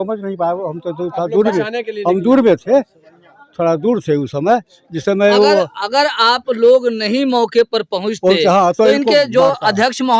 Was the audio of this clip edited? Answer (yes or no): no